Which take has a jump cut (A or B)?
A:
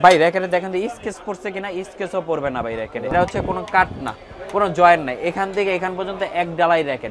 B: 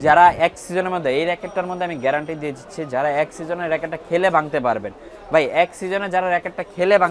A